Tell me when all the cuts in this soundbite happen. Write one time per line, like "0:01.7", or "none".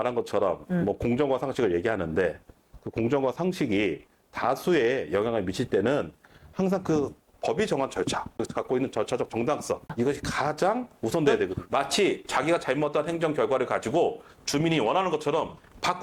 0:08.4
0:09.9
0:11.6